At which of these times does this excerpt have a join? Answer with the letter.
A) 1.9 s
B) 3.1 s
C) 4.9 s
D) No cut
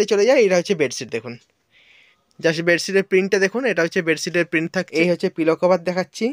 C